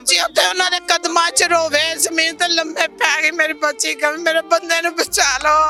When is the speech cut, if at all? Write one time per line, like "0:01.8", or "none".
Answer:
none